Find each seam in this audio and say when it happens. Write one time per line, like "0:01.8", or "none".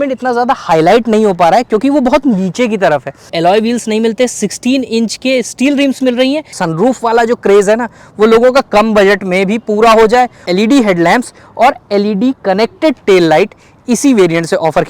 0:03.3
0:06.6
0:10.5